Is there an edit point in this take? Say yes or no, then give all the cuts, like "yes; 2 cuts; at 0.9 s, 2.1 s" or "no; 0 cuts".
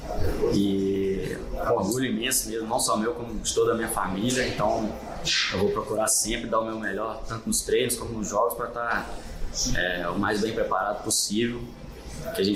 no; 0 cuts